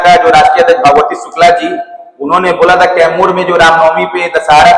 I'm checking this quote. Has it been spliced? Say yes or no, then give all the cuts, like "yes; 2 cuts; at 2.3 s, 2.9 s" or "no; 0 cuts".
no; 0 cuts